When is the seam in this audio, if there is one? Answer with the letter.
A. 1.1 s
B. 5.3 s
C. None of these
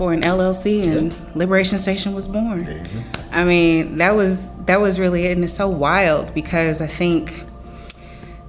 C